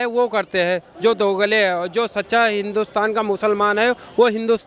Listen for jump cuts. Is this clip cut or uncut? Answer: uncut